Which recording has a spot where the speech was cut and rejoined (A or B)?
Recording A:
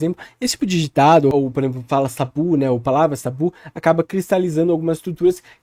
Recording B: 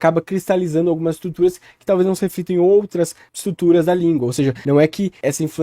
B